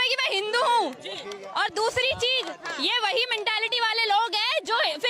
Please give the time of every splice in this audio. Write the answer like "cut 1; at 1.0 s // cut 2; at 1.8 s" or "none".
none